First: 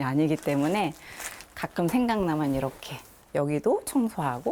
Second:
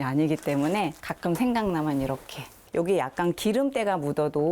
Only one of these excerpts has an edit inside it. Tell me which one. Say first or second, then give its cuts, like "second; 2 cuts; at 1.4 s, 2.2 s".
second; 2 cuts; at 1.0 s, 2.6 s